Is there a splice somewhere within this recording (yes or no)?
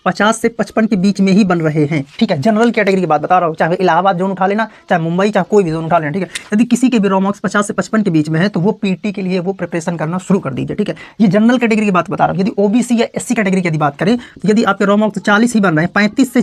no